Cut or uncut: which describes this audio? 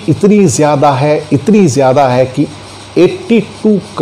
uncut